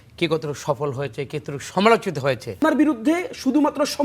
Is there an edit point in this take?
yes; 1 cut; at 2.6 s

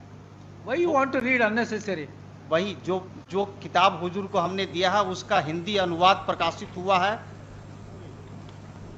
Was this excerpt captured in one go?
yes; 0 cuts

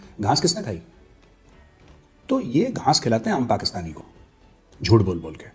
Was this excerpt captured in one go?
yes; 0 cuts

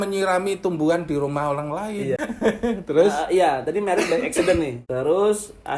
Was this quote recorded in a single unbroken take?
no; 2 cuts; at 2.2 s, 4.8 s

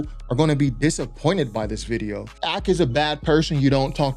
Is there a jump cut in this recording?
yes; 1 cut; at 2.4 s

